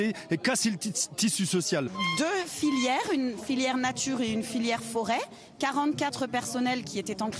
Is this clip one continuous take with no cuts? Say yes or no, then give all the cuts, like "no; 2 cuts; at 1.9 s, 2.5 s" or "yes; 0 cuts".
no; 1 cut; at 2.0 s